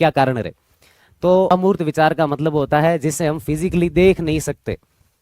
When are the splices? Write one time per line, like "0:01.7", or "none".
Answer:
0:01.5